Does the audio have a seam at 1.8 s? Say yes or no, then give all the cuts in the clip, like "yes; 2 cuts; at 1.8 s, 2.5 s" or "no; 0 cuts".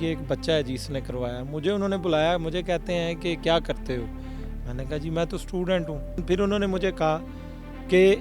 no; 1 cut; at 6.2 s